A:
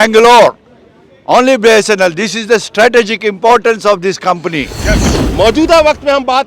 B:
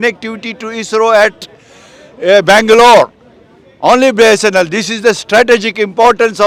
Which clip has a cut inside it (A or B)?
A